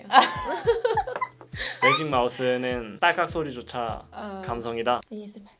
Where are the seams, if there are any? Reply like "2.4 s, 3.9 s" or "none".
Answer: none